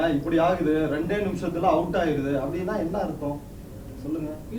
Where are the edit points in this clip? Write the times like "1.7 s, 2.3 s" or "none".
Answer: none